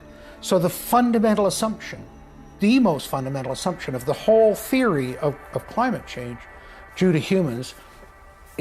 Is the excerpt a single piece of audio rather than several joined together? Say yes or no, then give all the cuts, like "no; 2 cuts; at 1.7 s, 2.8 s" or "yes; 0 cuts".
yes; 0 cuts